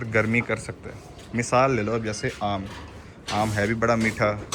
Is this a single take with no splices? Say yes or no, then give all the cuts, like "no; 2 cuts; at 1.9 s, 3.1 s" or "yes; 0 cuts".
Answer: yes; 0 cuts